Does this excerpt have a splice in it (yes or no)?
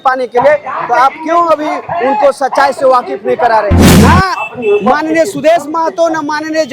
yes